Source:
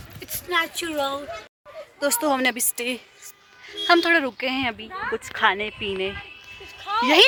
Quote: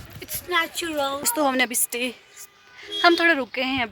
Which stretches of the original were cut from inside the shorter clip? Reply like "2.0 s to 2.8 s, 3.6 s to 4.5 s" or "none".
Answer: 1.3 s to 2.1 s